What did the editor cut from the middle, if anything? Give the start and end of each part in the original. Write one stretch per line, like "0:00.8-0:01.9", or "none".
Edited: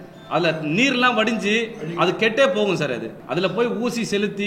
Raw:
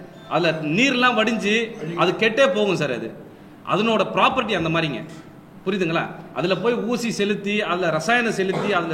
0:03.2-0:06.2

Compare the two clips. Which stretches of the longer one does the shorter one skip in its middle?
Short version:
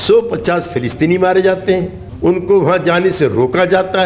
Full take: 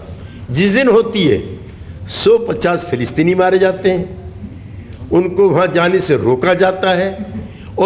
0:04.2-0:04.9

